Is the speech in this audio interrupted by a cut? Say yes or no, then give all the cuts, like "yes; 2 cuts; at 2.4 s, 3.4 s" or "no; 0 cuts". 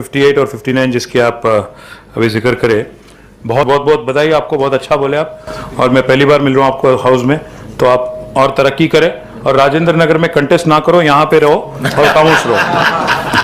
yes; 1 cut; at 3.6 s